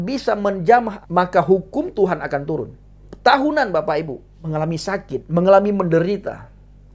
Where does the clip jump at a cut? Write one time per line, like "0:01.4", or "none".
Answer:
0:01.0
0:03.1
0:04.4

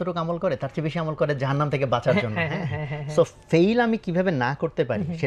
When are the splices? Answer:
none

